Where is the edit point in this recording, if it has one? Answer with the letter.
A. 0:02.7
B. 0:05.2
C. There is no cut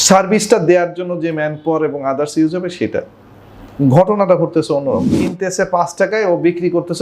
B